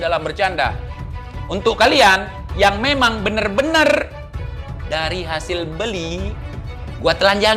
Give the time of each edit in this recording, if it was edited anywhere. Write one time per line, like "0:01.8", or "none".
0:00.9